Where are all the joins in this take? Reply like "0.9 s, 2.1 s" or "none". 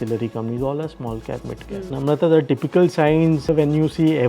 1.9 s, 3.4 s